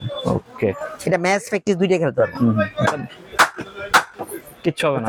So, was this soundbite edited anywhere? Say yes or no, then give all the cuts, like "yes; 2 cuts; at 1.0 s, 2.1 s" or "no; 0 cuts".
no; 0 cuts